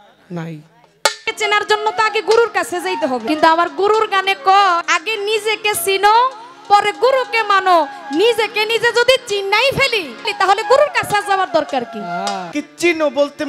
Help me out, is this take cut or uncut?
cut